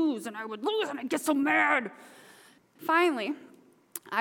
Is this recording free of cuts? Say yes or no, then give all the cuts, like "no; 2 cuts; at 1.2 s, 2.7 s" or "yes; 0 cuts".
no; 1 cut; at 2.6 s